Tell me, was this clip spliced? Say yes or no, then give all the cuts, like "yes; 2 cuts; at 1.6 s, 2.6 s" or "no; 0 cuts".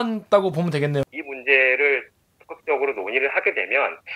yes; 1 cut; at 1.1 s